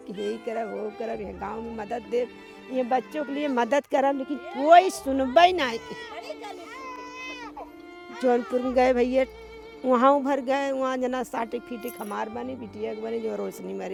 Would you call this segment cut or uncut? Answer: uncut